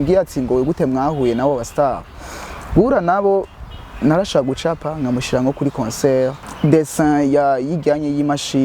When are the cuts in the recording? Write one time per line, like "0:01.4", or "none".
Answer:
0:06.5